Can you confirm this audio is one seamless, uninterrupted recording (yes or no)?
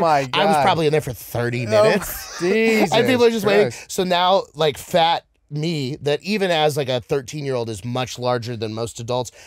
yes